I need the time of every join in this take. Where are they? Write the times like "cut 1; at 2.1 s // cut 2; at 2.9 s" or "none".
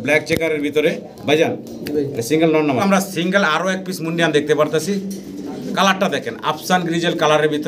cut 1; at 2.8 s